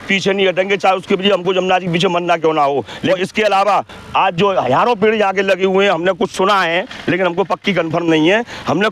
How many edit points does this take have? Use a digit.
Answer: 1